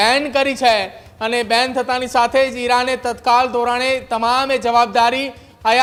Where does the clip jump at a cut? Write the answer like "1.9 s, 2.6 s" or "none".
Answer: none